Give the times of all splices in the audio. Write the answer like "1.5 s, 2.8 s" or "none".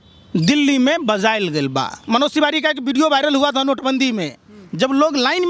2.0 s